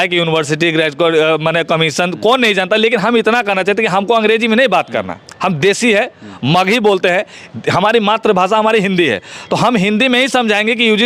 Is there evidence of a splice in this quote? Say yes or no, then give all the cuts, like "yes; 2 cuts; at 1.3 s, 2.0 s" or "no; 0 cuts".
no; 0 cuts